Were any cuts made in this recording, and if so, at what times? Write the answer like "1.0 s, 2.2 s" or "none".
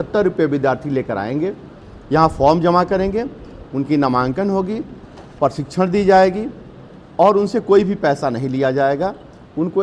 none

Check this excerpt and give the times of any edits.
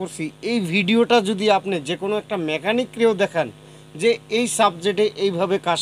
none

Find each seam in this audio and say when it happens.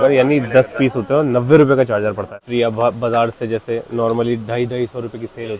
2.4 s

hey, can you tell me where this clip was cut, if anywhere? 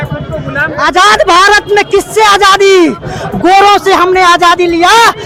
none

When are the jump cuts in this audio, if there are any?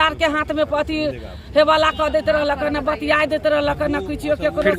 none

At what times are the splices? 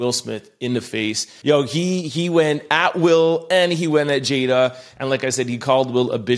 1.3 s

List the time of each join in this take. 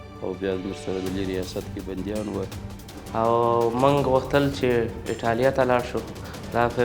3.0 s

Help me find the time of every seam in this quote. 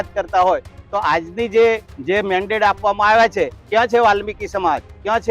1.9 s, 3.6 s

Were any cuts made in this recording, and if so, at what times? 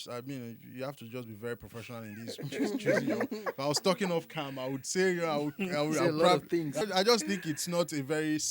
6.8 s

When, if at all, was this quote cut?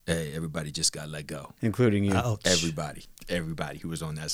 3.1 s

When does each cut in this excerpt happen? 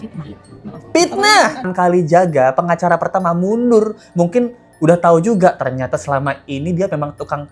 1.7 s

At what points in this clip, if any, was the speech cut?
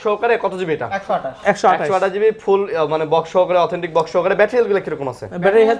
none

